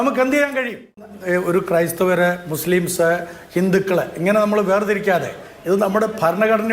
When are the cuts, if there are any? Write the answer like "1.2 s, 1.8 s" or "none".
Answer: 1.1 s